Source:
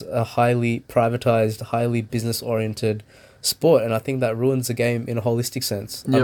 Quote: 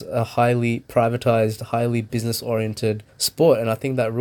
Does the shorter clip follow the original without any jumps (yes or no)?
no